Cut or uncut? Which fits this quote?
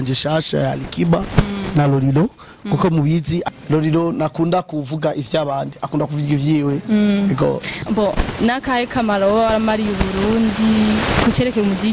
cut